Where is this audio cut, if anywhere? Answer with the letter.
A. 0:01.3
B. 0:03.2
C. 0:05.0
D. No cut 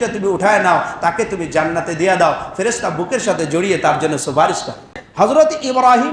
C